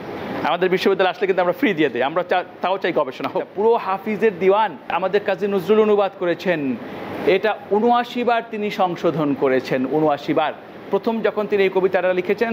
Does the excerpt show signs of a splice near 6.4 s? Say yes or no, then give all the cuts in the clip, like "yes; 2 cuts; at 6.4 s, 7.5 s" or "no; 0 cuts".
no; 2 cuts; at 3.5 s, 4.9 s